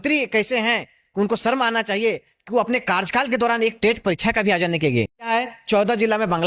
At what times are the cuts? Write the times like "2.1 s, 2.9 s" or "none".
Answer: 5.3 s